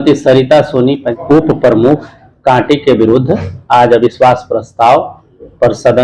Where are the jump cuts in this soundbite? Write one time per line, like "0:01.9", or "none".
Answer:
0:01.1